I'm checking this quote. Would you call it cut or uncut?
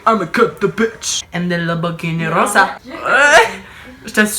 uncut